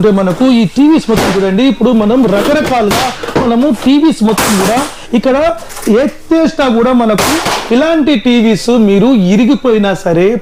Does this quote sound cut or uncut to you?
uncut